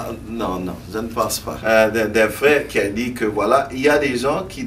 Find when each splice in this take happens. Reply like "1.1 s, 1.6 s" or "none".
1.5 s

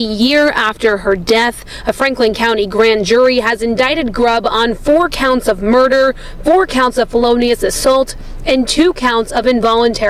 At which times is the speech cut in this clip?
none

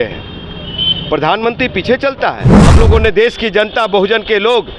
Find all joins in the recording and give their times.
2.5 s

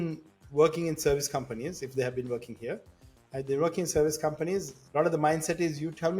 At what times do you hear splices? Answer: 4.8 s

